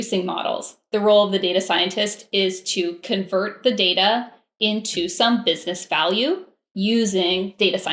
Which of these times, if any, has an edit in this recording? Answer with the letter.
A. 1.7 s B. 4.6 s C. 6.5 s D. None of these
D